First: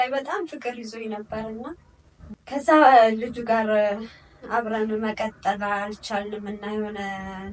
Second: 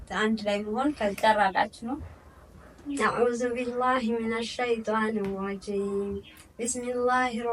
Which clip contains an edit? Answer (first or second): second